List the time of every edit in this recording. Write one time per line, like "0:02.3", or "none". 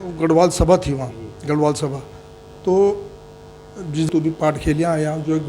0:04.1